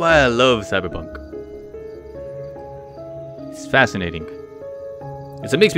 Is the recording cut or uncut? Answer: uncut